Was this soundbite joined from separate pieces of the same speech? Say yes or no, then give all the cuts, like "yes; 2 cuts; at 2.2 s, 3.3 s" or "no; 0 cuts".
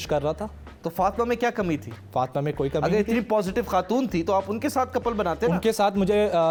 no; 0 cuts